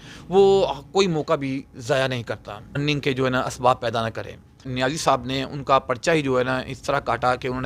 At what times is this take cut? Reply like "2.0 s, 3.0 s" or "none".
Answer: 2.8 s, 4.7 s